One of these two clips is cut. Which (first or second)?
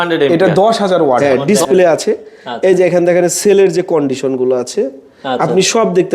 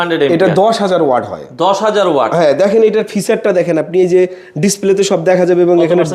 first